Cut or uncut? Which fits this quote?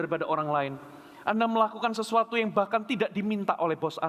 uncut